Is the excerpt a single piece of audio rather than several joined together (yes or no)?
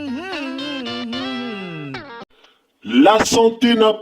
no